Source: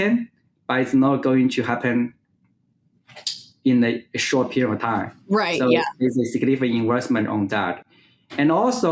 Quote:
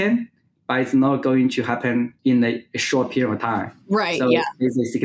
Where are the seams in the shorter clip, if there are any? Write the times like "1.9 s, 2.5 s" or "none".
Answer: 2.1 s